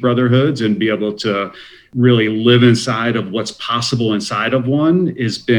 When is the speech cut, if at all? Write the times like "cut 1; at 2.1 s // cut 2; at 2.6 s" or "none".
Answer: cut 1; at 1.9 s